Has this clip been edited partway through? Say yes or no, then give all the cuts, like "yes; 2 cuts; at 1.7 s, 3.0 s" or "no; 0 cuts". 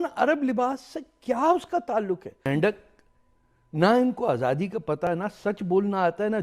yes; 2 cuts; at 2.5 s, 5.1 s